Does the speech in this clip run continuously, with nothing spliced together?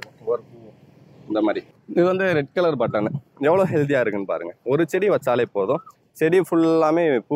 no; 1 cut; at 1.7 s

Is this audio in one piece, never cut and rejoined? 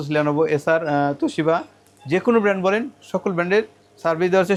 yes; 0 cuts

